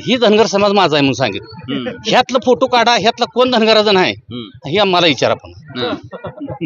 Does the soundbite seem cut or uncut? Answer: uncut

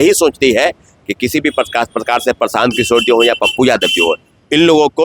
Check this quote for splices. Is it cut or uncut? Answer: uncut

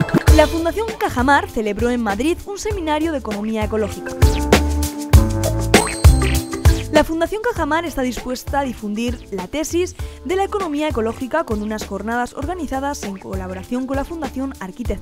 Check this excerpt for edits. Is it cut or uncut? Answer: uncut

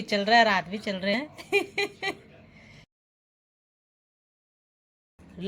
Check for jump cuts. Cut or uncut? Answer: uncut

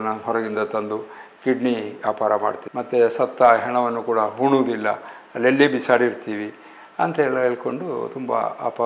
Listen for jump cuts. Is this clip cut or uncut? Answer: uncut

